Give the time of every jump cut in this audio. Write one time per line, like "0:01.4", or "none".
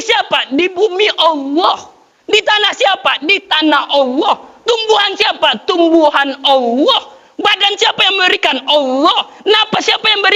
none